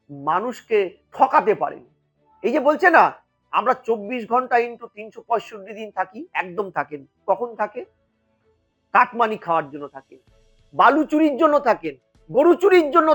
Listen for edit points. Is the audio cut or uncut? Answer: cut